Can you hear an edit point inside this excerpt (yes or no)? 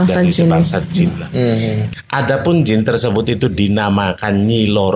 yes